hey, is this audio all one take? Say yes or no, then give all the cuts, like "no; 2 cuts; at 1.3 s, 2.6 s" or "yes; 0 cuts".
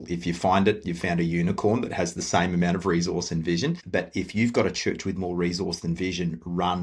no; 1 cut; at 3.8 s